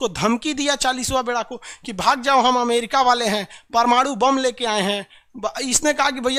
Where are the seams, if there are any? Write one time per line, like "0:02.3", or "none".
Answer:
none